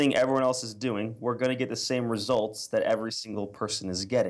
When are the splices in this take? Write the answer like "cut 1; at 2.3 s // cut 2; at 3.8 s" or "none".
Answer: none